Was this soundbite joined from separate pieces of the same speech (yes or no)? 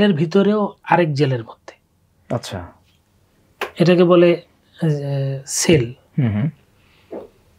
no